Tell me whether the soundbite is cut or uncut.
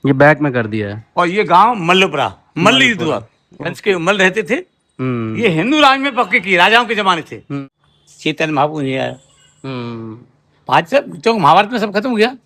cut